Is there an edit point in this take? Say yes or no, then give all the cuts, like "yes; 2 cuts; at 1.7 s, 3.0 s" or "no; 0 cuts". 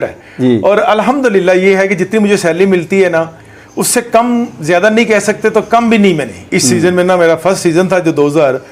no; 0 cuts